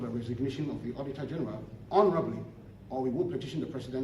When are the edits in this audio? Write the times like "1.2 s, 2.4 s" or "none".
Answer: 1.7 s